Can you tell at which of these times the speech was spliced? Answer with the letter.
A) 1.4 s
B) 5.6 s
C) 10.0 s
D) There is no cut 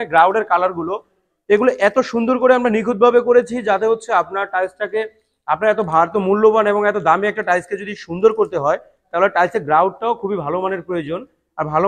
D